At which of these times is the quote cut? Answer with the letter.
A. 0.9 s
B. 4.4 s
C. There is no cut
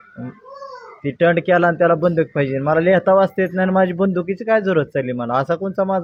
C